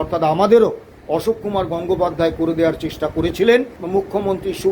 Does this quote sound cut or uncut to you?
cut